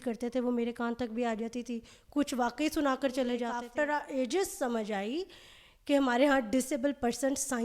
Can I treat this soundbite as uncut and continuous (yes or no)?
no